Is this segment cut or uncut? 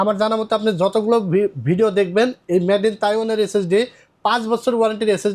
uncut